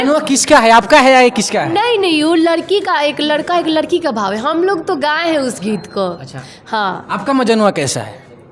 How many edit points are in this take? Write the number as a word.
zero